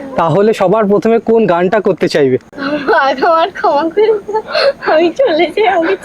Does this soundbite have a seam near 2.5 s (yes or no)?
yes